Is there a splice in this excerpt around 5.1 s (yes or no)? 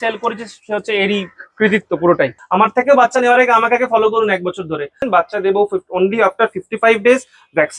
yes